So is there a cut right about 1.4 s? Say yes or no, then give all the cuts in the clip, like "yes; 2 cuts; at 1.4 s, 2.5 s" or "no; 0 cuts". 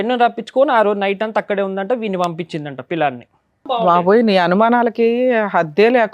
no; 1 cut; at 3.8 s